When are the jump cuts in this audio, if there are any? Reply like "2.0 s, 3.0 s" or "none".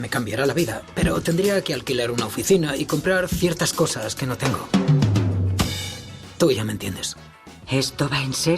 none